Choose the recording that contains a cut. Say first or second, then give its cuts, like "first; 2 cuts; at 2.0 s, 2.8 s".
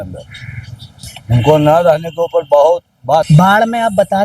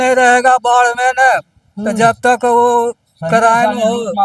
first; 1 cut; at 3.3 s